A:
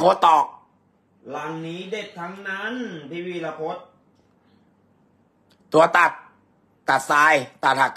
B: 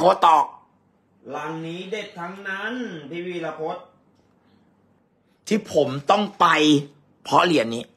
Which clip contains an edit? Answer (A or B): B